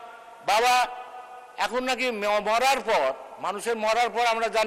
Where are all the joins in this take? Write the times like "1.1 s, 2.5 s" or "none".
none